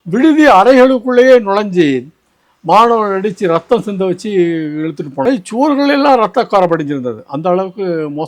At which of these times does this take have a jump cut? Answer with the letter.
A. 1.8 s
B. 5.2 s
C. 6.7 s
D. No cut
B